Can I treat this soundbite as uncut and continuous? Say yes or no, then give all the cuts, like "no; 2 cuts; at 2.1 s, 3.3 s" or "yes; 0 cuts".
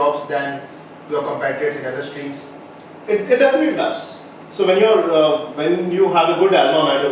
yes; 0 cuts